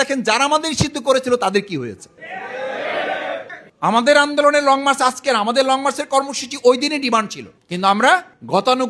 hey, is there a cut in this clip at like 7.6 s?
no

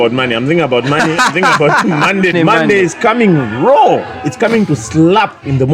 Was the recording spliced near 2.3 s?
yes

